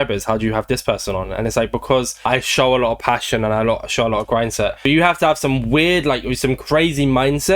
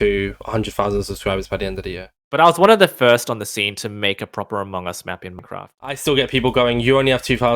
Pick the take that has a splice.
second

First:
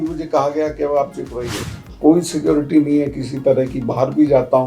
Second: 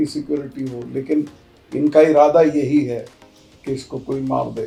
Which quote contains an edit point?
first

